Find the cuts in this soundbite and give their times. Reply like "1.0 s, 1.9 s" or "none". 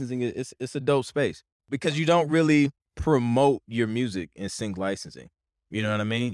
1.7 s, 2.9 s